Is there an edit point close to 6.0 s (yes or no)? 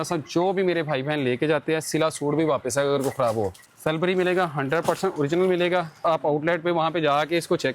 yes